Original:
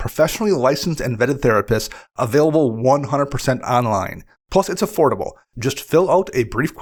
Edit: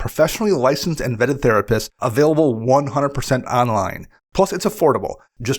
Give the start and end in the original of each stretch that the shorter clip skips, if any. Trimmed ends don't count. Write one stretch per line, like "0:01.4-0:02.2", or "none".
0:02.0-0:02.1